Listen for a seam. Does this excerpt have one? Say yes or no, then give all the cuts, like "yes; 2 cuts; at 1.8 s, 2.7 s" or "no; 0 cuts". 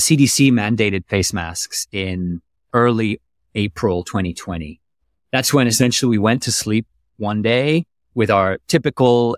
yes; 1 cut; at 2.6 s